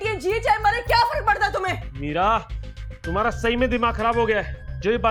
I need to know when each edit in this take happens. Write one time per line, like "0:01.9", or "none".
none